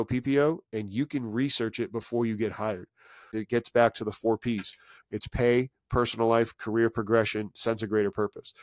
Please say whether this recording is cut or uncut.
cut